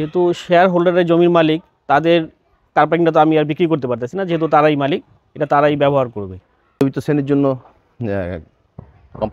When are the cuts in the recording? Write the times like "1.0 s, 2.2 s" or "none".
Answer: 6.3 s